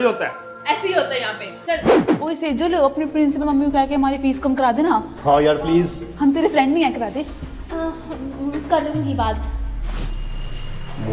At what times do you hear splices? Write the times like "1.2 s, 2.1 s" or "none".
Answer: none